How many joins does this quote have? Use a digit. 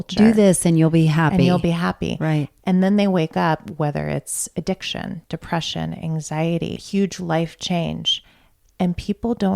1